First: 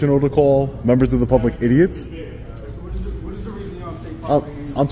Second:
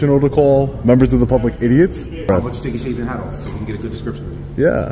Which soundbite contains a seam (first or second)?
second